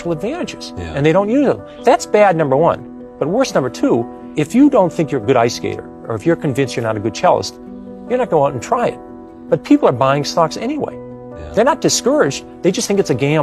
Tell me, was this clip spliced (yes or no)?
yes